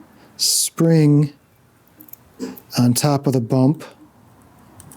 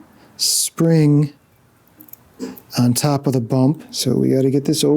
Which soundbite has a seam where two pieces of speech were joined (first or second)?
second